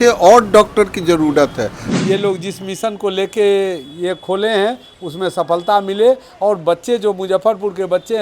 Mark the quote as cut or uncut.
cut